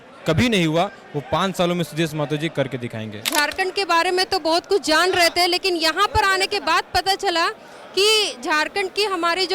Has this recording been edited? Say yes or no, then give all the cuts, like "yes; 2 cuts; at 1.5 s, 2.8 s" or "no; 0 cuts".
yes; 1 cut; at 3.2 s